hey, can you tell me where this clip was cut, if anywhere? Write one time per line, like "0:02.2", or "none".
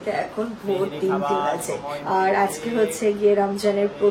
0:01.9